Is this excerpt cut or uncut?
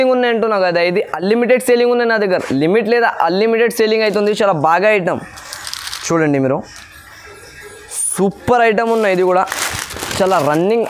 uncut